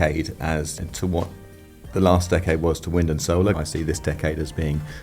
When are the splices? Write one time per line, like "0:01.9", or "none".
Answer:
0:00.8
0:03.6